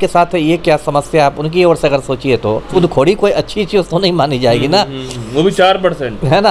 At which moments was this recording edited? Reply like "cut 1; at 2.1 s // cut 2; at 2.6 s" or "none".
cut 1; at 2.7 s